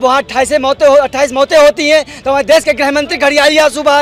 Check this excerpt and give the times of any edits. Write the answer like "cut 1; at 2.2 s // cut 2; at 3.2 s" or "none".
none